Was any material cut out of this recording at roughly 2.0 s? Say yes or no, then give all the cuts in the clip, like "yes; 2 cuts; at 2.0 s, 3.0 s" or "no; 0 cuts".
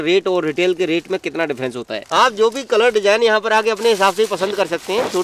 yes; 1 cut; at 2.0 s